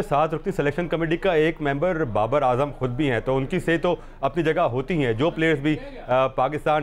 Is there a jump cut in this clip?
no; 0 cuts

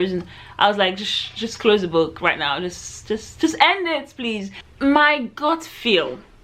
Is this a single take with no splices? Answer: no; 1 cut; at 4.6 s

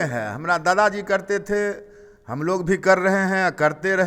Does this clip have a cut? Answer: no; 0 cuts

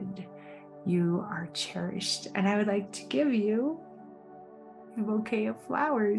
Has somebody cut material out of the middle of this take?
no; 0 cuts

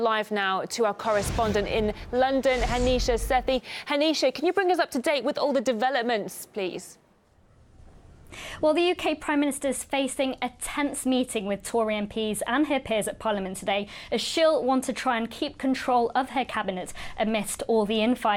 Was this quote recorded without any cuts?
no; 1 cut; at 11.3 s

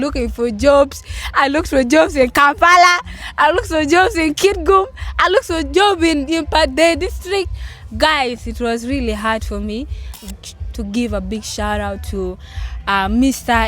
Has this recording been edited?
yes; 1 cut; at 10.2 s

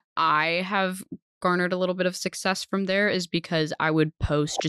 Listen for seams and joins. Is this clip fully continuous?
yes; 0 cuts

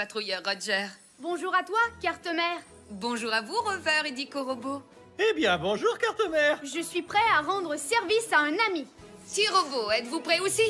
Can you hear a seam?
no; 0 cuts

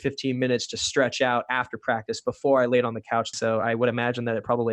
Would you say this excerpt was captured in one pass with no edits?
no; 1 cut; at 3.3 s

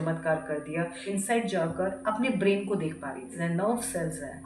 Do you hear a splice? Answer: yes; 2 cuts; at 1.0 s, 3.4 s

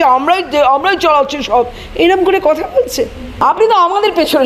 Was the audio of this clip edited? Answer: yes; 1 cut; at 3.3 s

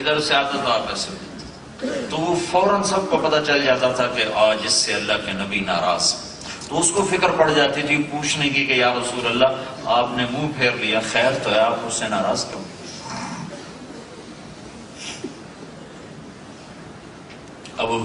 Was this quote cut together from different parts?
yes; 1 cut; at 6.7 s

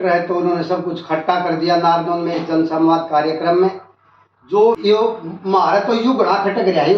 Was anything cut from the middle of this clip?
yes; 1 cut; at 4.8 s

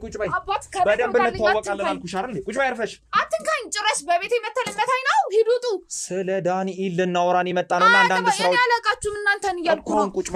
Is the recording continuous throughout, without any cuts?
yes; 0 cuts

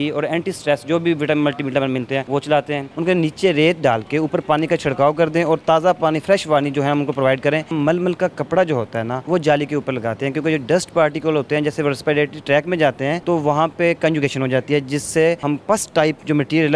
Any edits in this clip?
yes; 6 cuts; at 2.3 s, 2.9 s, 7.7 s, 9.2 s, 13.2 s, 15.4 s

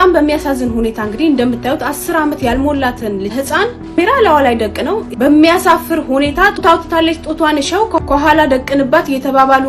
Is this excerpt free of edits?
yes; 0 cuts

